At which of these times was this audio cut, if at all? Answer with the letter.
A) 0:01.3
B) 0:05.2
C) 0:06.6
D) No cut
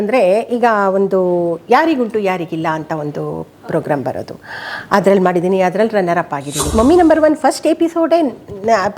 C